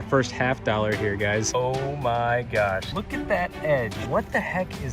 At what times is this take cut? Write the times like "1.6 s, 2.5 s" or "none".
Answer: 1.5 s, 2.9 s, 4.0 s